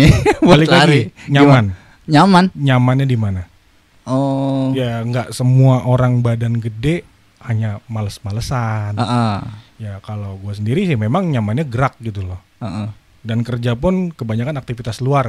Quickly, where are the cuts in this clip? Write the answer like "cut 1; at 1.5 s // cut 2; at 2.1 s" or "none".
none